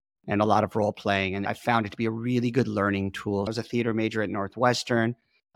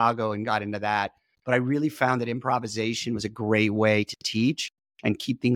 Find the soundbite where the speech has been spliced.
first; 2 cuts; at 1.5 s, 3.5 s

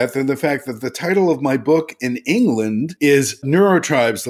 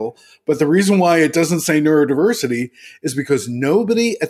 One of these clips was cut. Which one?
first; 1 cut; at 3.4 s

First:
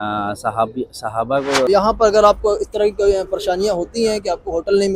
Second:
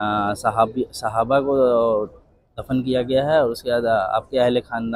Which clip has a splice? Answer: first; 1 cut; at 1.7 s

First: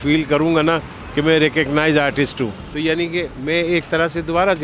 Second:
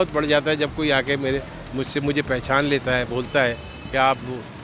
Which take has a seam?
first; 1 cut; at 2.6 s

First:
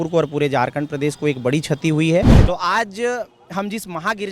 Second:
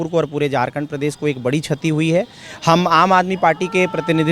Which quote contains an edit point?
first; 1 cut; at 2.4 s

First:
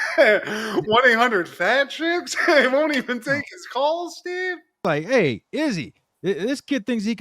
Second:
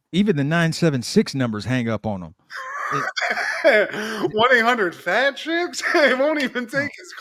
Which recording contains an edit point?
first; 1 cut; at 4.8 s

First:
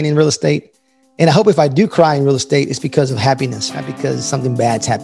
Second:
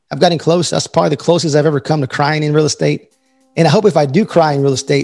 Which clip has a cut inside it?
first; 1 cut; at 3.7 s

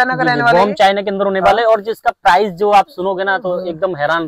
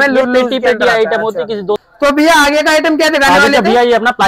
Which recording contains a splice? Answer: second; 1 cut; at 1.8 s

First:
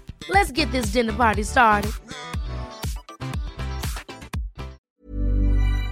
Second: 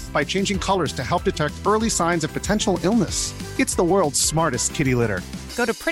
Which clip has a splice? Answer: first; 1 cut; at 4.8 s

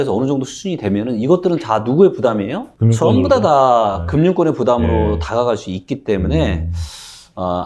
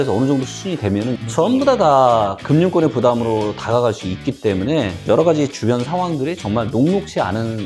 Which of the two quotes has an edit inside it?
second; 2 cuts; at 1.2 s, 5.0 s

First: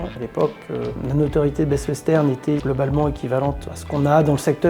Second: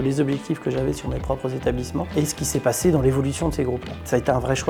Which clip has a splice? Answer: first; 3 cuts; at 1.0 s, 2.6 s, 3.6 s

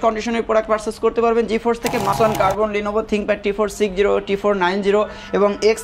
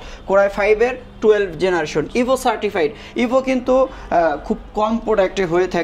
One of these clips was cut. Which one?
first; 1 cut; at 2.1 s

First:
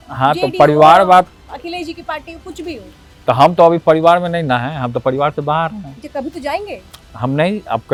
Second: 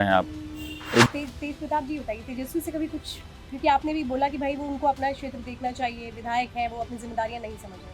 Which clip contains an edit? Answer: second; 1 cut; at 1.1 s

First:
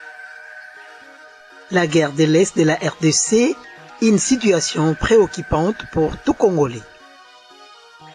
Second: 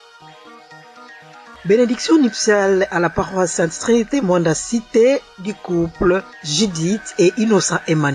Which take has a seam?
second; 1 cut; at 0.9 s

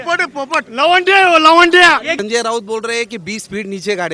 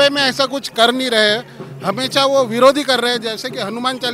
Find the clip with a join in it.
first; 1 cut; at 2.1 s

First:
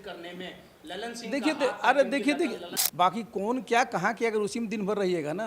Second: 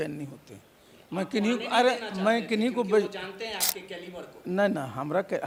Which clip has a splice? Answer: first; 1 cut; at 2.7 s

